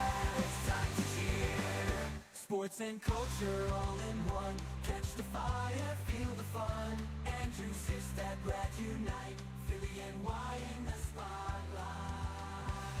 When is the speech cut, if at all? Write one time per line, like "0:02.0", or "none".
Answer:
none